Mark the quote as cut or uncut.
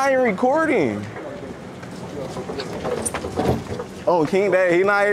uncut